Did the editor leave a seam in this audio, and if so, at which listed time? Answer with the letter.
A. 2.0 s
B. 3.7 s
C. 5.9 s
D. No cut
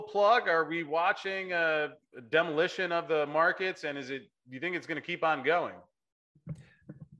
A